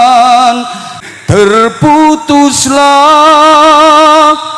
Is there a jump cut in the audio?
yes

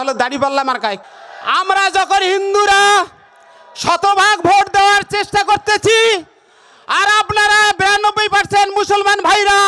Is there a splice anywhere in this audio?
yes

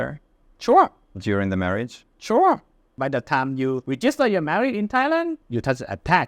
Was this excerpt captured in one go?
no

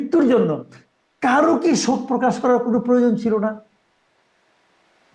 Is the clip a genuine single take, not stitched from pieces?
yes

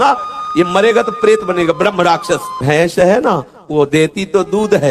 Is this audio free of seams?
no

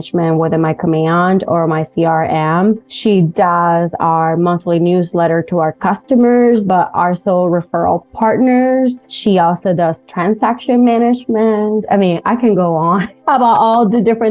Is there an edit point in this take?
yes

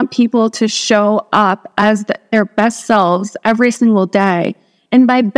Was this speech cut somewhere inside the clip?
yes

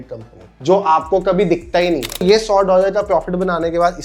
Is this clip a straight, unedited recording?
no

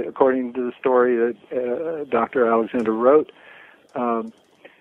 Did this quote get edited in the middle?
no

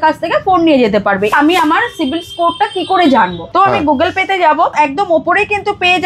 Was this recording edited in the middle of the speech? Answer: yes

